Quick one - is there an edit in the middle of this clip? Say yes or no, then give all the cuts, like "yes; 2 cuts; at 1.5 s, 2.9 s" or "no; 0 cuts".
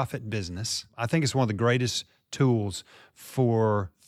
yes; 1 cut; at 0.9 s